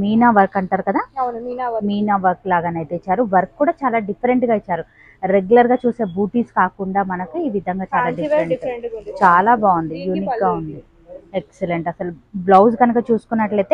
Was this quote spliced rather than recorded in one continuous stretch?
no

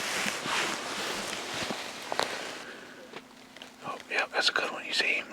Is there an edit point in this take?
yes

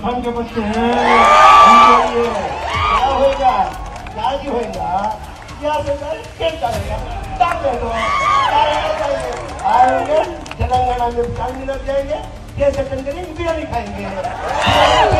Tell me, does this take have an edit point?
no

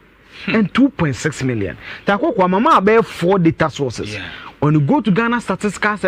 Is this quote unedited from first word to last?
yes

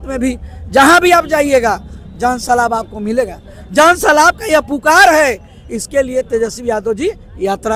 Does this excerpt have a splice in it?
no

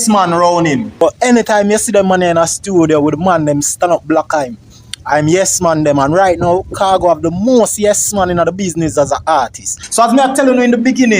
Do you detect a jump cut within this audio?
yes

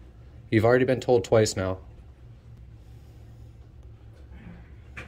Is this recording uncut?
yes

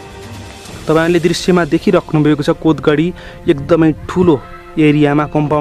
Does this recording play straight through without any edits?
yes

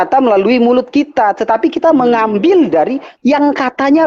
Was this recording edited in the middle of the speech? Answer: no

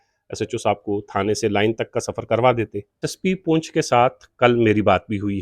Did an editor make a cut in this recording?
yes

